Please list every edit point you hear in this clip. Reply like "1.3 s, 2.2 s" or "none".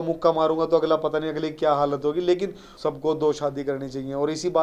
2.6 s